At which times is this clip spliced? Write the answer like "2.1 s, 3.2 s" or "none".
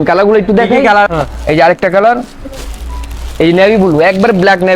1.1 s